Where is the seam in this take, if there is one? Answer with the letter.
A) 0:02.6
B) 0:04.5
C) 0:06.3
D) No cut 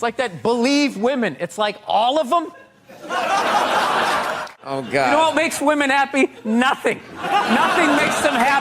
B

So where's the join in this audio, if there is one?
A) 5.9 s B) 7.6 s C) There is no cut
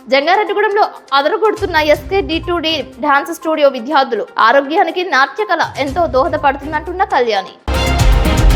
B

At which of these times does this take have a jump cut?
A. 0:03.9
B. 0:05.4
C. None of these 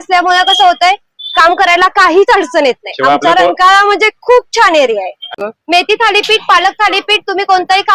B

